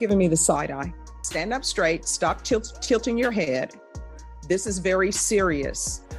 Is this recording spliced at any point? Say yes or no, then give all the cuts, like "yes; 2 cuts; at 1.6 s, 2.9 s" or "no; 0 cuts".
no; 0 cuts